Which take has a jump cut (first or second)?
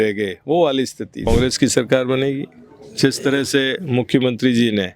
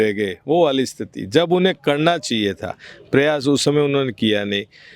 first